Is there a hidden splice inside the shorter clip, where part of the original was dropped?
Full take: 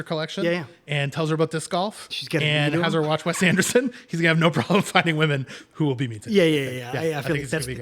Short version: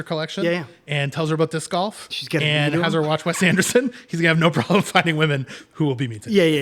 no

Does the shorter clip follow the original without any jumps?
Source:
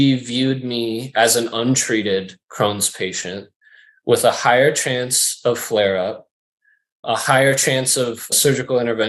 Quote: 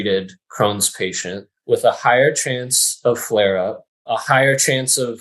no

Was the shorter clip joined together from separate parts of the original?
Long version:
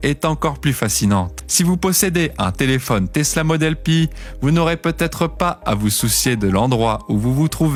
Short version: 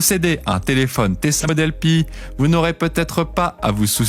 yes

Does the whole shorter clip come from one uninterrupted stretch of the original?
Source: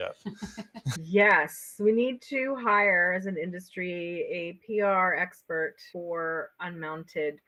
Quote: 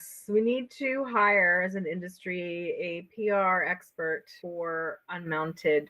yes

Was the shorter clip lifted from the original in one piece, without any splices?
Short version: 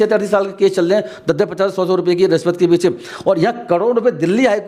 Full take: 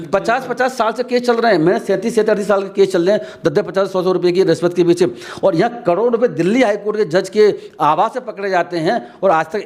yes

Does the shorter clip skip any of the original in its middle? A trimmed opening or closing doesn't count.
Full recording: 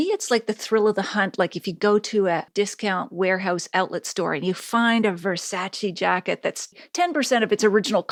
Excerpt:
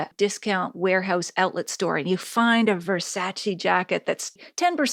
no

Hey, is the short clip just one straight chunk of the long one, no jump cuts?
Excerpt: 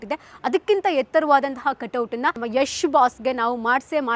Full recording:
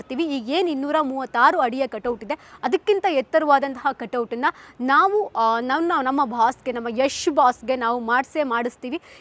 no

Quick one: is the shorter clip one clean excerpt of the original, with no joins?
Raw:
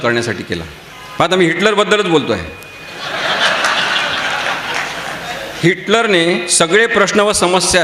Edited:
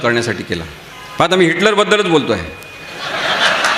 yes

